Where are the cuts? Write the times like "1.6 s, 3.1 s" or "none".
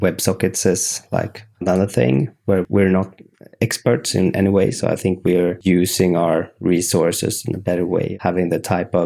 5.6 s, 8.1 s